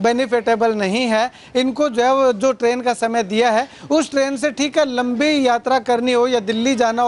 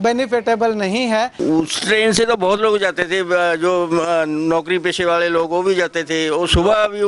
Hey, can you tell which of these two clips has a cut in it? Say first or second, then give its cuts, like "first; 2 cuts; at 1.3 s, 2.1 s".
second; 1 cut; at 1.4 s